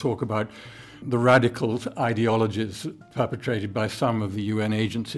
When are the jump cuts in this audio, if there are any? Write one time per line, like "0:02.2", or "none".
0:01.0